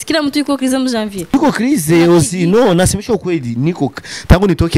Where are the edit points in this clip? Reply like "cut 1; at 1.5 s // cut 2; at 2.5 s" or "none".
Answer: cut 1; at 1.3 s